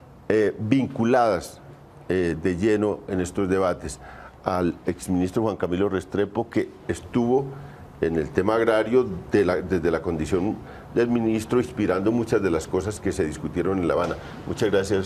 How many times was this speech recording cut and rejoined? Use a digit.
1